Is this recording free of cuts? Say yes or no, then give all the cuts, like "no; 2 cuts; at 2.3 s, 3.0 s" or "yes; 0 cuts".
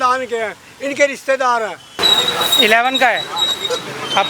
no; 1 cut; at 2.0 s